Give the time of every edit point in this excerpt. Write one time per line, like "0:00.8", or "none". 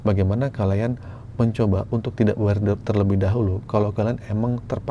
none

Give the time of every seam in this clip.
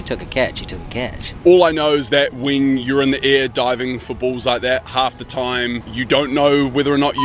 0:01.3
0:04.9
0:05.9

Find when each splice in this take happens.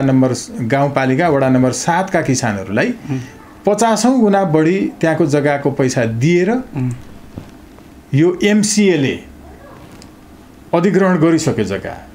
none

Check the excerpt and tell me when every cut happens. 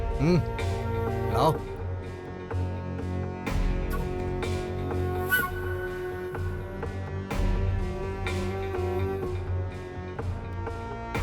none

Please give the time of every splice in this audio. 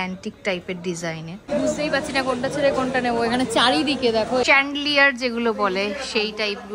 0:01.4
0:04.4

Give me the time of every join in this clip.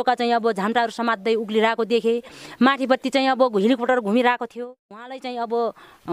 0:05.1

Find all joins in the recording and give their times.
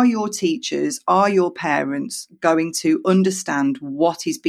none

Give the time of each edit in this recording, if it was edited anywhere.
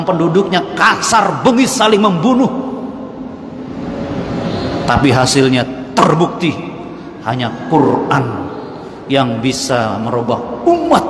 none

